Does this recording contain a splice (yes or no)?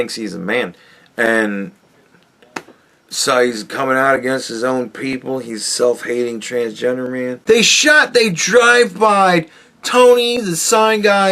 yes